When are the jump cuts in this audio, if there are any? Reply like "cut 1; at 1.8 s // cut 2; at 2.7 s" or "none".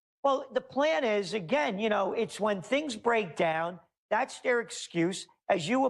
cut 1; at 1.7 s

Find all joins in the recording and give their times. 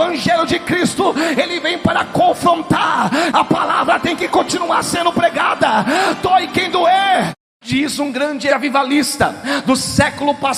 cut 1; at 3.3 s // cut 2; at 7.3 s // cut 3; at 8.5 s

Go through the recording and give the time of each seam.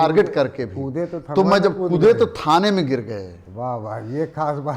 none

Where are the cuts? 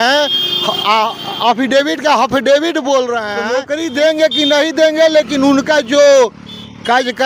cut 1; at 3.4 s

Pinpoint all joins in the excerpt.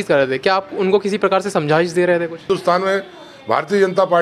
cut 1; at 2.4 s

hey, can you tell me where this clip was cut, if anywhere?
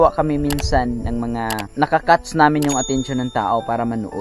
cut 1; at 1.7 s

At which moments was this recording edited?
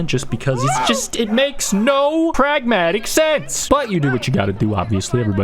cut 1; at 2.3 s // cut 2; at 3.5 s

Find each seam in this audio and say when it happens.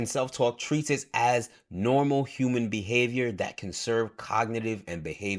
none

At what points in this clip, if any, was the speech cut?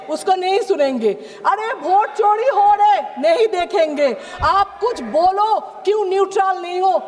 none

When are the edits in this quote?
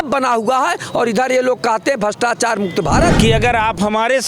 cut 1; at 3.2 s

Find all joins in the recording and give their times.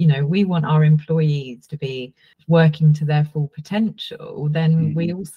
cut 1; at 2.3 s

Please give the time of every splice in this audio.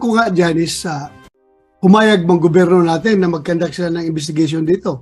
none

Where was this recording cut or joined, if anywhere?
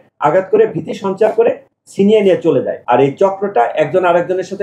cut 1; at 2.7 s

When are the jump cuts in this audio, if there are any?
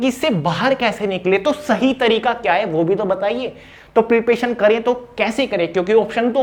none

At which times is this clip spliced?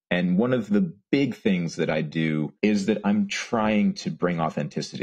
cut 1; at 1.0 s // cut 2; at 2.5 s

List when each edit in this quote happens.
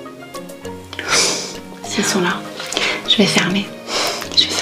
cut 1; at 1.9 s

